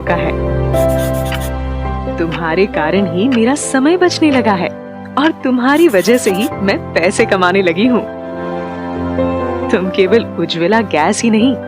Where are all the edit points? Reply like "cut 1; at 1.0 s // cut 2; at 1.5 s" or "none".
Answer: cut 1; at 1.1 s // cut 2; at 8.8 s

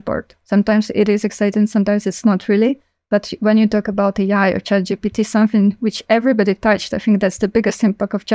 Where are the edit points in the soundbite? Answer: none

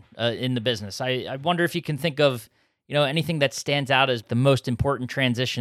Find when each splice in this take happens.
cut 1; at 4.2 s

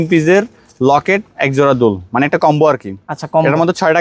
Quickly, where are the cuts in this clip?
none

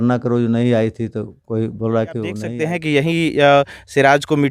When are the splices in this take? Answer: cut 1; at 2.5 s

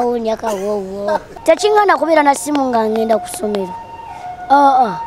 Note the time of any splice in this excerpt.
cut 1; at 1.3 s

